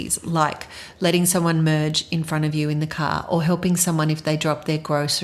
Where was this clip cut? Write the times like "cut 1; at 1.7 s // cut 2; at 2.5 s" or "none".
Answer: none